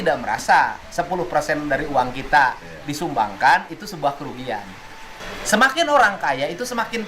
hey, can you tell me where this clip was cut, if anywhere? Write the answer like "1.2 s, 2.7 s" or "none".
5.2 s